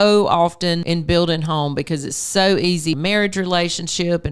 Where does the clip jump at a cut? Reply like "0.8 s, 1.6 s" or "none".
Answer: 0.8 s, 3.0 s